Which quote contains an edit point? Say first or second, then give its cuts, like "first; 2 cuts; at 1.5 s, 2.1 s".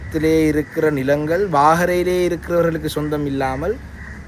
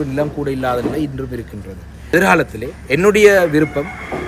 second; 1 cut; at 2.1 s